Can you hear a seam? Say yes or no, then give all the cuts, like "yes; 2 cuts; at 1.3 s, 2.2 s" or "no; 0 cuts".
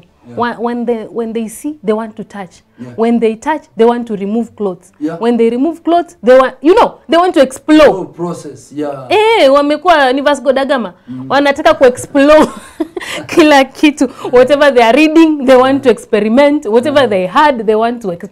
no; 0 cuts